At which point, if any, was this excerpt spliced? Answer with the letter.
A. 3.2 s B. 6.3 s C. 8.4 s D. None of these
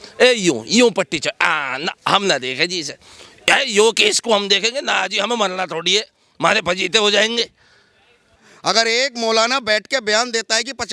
C